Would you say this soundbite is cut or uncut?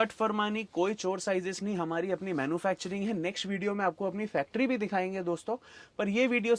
uncut